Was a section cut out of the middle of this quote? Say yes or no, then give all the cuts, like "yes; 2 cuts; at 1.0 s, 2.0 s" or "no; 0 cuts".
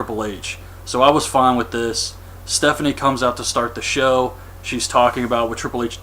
yes; 1 cut; at 3.4 s